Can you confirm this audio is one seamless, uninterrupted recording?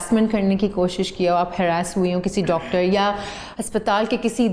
yes; 0 cuts

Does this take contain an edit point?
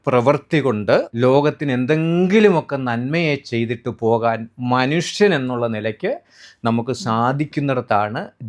yes; 1 cut; at 1.1 s

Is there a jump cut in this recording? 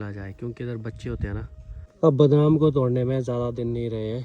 yes; 1 cut; at 1.8 s

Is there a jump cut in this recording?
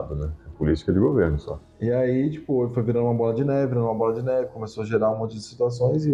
no; 0 cuts

